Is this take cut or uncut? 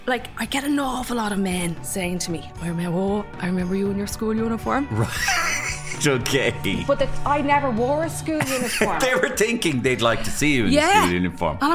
uncut